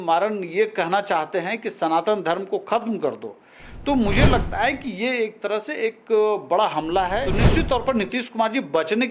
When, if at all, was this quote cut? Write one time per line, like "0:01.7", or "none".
0:07.4